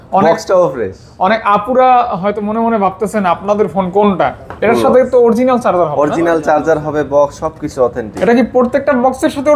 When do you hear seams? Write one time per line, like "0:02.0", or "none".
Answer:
0:04.5